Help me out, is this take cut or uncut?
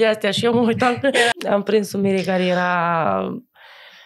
cut